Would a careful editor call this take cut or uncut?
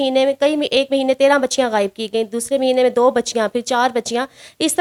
uncut